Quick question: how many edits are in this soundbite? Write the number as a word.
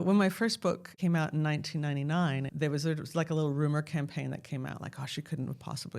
two